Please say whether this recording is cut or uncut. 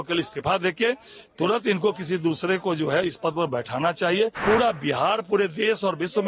cut